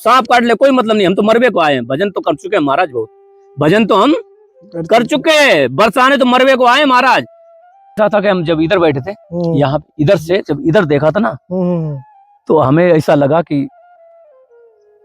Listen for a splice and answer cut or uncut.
cut